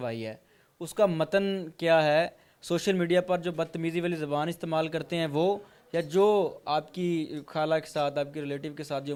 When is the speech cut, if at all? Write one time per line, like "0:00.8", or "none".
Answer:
none